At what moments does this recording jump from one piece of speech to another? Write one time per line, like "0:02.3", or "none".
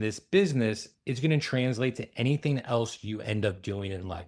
none